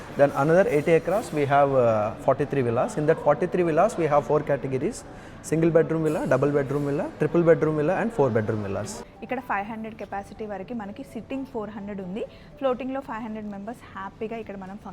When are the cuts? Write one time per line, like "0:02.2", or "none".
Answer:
0:09.0